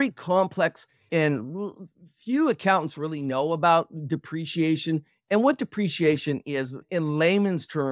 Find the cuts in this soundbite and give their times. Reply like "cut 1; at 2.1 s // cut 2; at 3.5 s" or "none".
cut 1; at 1.1 s // cut 2; at 6.9 s